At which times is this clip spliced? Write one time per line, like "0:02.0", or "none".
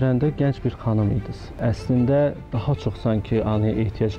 0:01.6

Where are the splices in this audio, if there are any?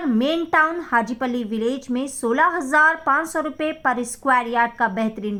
none

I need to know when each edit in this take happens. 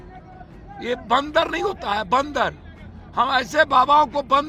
none

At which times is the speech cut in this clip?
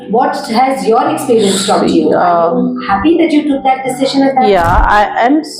none

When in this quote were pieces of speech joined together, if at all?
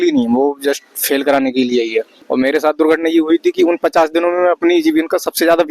0:02.2

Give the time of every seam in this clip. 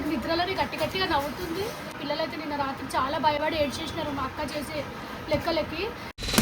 0:02.0

